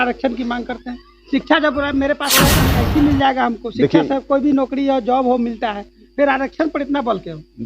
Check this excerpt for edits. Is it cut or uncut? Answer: cut